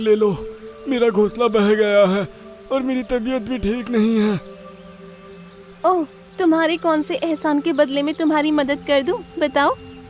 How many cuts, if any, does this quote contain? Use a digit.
0